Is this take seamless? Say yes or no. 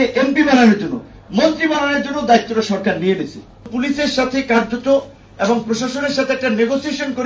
no